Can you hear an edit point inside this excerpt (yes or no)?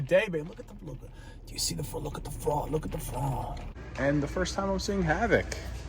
yes